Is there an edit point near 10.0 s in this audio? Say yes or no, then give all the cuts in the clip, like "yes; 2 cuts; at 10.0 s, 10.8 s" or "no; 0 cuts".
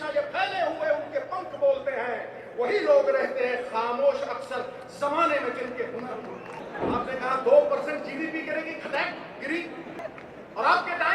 yes; 2 cuts; at 6.6 s, 10.0 s